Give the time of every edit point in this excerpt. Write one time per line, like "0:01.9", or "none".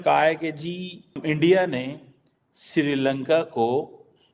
0:01.2